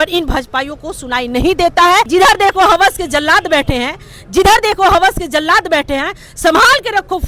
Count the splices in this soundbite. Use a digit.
1